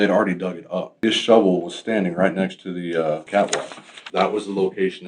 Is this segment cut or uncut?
cut